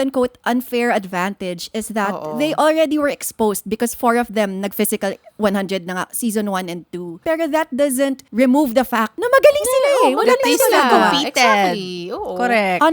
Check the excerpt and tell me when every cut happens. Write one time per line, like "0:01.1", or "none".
0:07.1
0:08.2
0:09.1